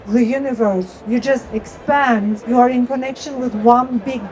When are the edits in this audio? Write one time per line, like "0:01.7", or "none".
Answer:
0:01.0
0:02.4